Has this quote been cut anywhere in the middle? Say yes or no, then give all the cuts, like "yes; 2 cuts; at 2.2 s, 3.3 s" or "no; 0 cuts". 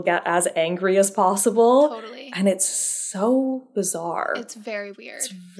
no; 0 cuts